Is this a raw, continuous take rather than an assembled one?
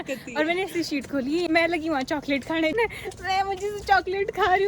no; 2 cuts; at 1.5 s, 2.8 s

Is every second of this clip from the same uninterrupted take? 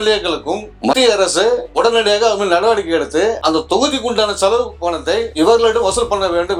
yes; 0 cuts

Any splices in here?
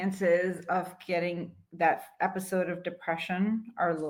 no; 0 cuts

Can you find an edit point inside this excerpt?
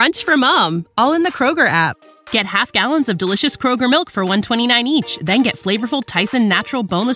no; 0 cuts

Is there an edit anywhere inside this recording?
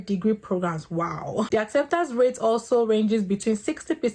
no; 0 cuts

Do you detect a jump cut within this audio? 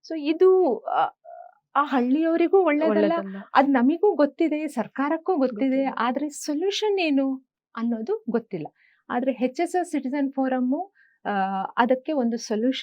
no; 0 cuts

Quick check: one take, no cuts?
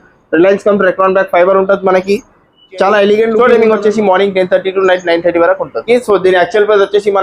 no; 2 cuts; at 3.4 s, 5.8 s

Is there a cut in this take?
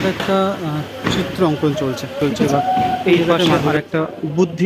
yes; 1 cut; at 2.2 s

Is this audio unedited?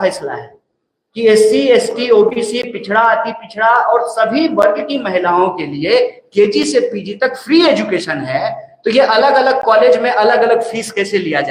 yes; 0 cuts

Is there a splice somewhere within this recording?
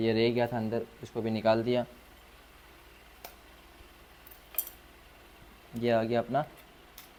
no; 0 cuts

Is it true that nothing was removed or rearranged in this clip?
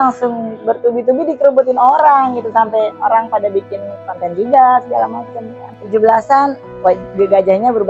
no; 1 cut; at 5.7 s

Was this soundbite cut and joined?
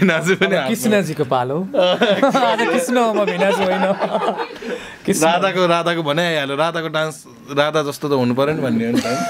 no; 0 cuts

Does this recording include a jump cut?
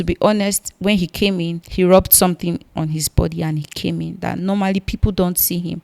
yes; 1 cut; at 1.6 s

